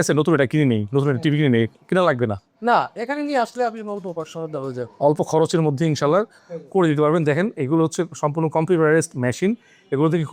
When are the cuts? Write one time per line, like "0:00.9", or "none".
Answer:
none